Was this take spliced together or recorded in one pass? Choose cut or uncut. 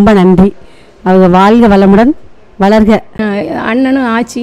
cut